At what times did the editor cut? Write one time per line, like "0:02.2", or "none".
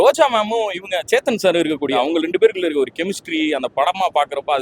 0:01.9

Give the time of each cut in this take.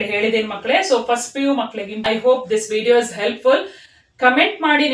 0:02.1

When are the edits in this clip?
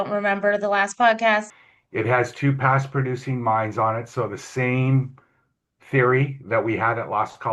0:01.5

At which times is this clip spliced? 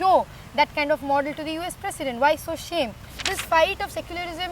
0:03.1

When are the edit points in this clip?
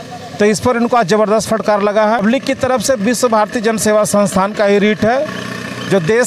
0:02.2

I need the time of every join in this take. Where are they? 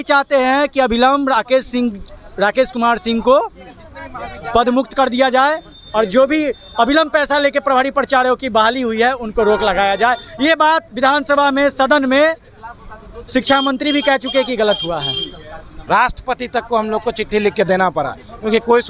0:15.7

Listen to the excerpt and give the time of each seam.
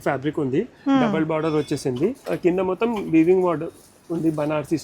0:02.2

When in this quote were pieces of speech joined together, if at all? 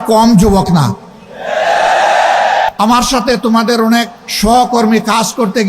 0:02.7
0:04.2

